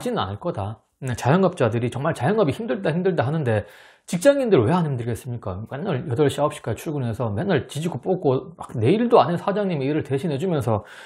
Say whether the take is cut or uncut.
uncut